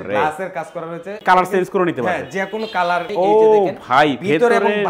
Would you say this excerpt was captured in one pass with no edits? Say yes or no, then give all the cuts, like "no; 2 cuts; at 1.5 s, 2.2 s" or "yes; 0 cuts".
no; 2 cuts; at 1.2 s, 3.1 s